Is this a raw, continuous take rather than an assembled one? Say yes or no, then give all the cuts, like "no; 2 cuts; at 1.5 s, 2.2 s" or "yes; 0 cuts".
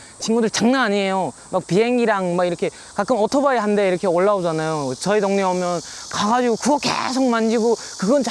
no; 1 cut; at 5.0 s